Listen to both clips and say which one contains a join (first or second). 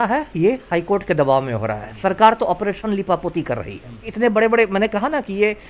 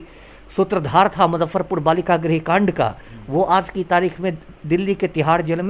first